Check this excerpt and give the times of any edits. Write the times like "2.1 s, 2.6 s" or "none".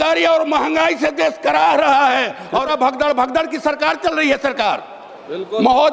2.7 s